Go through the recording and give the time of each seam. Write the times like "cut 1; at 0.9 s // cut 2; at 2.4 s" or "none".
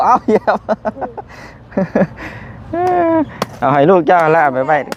none